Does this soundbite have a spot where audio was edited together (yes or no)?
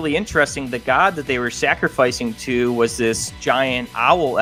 no